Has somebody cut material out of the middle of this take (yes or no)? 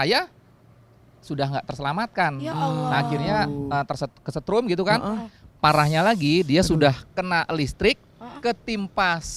no